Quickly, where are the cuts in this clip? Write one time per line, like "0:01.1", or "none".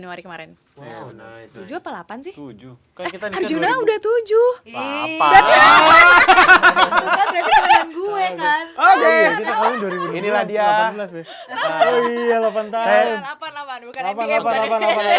none